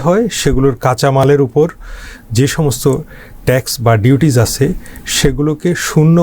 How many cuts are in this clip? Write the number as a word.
zero